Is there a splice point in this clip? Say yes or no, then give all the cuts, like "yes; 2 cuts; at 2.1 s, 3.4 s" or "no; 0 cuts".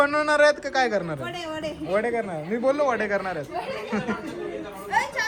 no; 0 cuts